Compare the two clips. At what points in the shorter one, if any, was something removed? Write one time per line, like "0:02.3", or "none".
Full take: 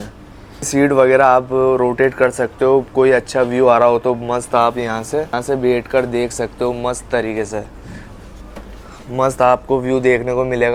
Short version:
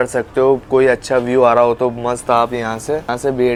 none